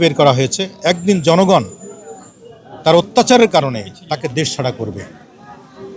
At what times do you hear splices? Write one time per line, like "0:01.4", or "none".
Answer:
none